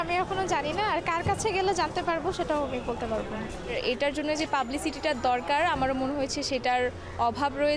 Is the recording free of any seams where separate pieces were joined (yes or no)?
yes